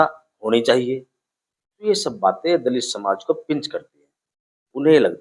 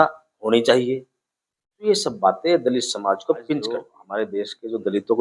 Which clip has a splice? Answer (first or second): second